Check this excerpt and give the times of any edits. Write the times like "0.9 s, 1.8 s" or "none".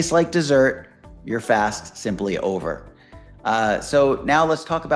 none